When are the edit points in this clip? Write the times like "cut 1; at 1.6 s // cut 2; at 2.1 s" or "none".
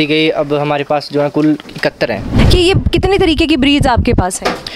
cut 1; at 2.4 s